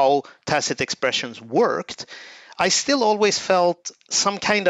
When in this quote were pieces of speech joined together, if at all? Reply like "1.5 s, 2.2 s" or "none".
none